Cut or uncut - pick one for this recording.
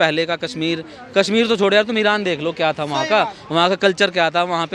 uncut